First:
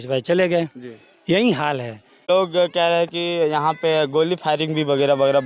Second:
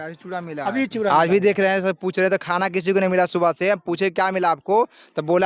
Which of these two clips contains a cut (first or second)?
first